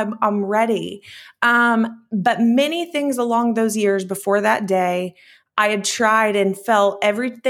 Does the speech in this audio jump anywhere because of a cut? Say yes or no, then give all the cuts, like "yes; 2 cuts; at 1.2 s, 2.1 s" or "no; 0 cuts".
no; 0 cuts